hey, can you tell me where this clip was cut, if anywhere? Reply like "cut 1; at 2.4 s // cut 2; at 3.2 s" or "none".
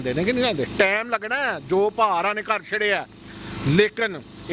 none